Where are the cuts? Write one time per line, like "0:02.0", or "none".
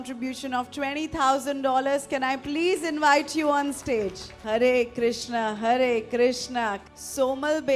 0:06.8